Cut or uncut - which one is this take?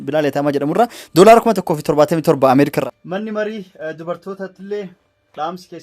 cut